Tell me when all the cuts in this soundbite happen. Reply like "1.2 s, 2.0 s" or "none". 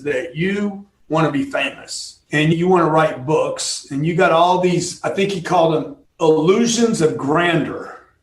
2.5 s, 6.0 s

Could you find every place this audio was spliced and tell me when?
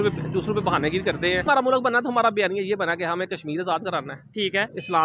1.5 s

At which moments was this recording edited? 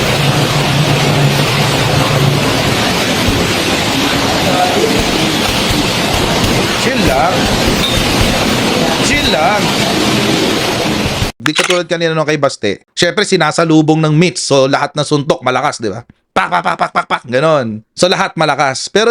11.7 s

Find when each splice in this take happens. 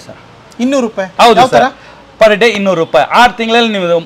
none

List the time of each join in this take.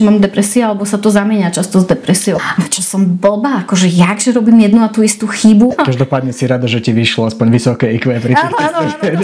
2.4 s, 5.7 s

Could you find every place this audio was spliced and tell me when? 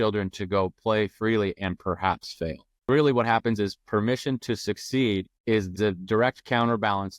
2.9 s, 5.8 s

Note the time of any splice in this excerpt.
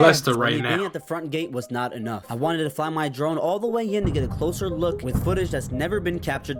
none

